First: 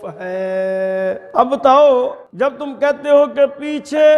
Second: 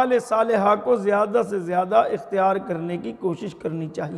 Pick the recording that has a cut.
first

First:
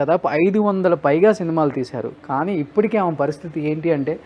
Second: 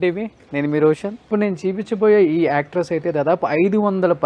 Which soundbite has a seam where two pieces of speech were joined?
second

